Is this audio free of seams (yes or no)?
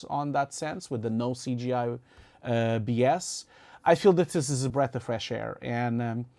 no